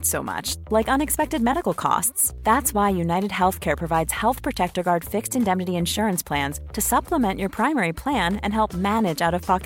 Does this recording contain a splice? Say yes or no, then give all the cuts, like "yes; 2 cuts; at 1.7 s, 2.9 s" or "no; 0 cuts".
no; 0 cuts